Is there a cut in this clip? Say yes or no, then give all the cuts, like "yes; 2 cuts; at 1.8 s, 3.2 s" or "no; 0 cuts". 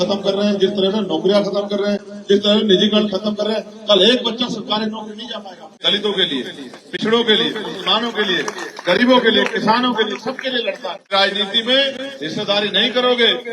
yes; 2 cuts; at 5.8 s, 11.1 s